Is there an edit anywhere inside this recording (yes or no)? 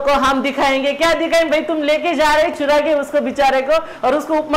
no